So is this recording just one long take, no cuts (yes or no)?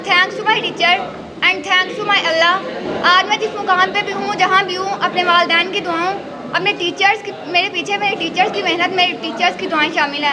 yes